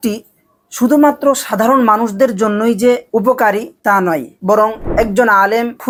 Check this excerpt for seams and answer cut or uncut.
uncut